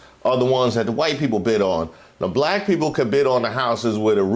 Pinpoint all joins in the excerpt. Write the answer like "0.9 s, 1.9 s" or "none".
none